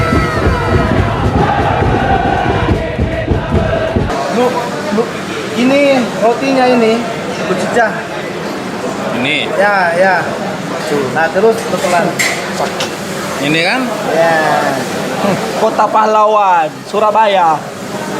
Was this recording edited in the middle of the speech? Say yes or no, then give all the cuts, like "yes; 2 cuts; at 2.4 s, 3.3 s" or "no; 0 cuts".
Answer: yes; 1 cut; at 4.1 s